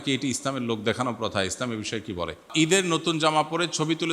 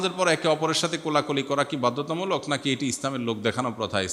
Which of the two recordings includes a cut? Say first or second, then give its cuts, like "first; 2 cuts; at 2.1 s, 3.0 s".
first; 1 cut; at 2.5 s